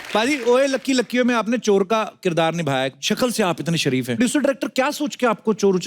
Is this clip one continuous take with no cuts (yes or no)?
no